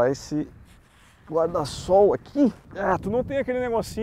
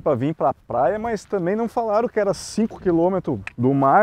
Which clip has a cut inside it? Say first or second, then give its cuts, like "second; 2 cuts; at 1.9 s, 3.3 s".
first; 1 cut; at 2.7 s